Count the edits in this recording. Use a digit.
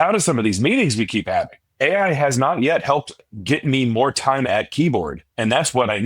1